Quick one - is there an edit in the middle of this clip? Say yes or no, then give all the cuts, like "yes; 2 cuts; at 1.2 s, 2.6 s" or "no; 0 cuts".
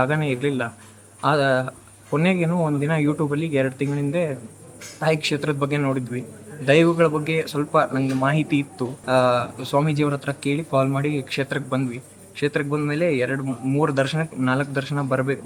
no; 0 cuts